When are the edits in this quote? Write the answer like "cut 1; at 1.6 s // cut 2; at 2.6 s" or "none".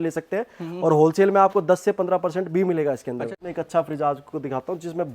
cut 1; at 3.4 s